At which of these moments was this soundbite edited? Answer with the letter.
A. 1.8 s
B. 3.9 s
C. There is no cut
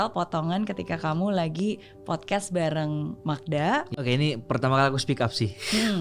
B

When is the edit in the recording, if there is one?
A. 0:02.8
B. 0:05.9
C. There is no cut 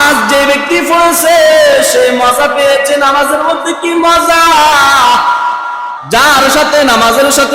B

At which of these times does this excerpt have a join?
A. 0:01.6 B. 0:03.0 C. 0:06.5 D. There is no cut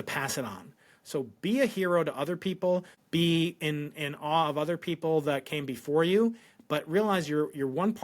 B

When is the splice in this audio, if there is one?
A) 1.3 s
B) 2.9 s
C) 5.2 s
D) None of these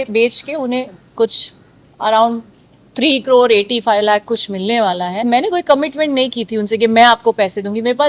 C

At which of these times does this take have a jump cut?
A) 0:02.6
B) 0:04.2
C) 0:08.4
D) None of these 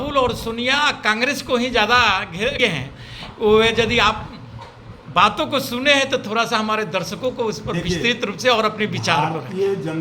A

